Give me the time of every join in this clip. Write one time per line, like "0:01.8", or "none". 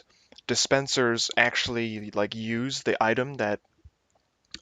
0:02.0